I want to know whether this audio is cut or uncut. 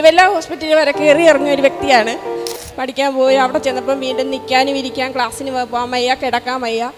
cut